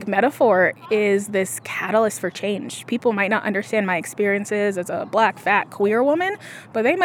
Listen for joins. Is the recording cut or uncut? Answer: uncut